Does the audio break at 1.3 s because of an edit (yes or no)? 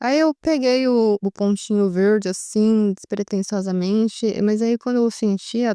yes